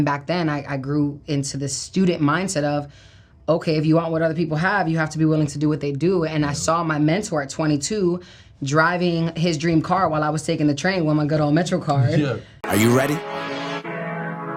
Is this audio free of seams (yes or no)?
no